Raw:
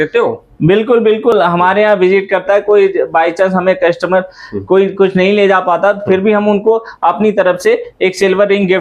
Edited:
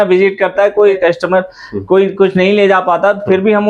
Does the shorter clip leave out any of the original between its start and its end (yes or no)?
yes